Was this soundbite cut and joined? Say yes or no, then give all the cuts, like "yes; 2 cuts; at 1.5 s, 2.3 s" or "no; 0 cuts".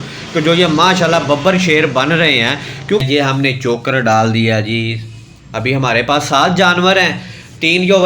yes; 1 cut; at 3.0 s